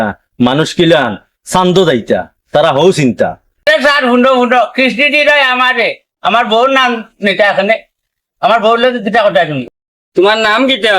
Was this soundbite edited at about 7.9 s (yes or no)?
no